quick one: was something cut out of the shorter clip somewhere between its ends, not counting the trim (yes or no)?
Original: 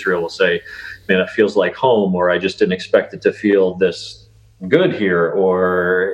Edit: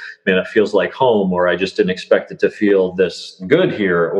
yes